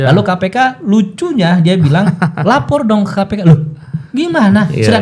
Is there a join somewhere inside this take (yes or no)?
no